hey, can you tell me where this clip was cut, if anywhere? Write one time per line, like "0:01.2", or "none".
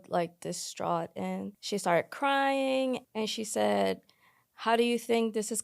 0:01.6
0:03.0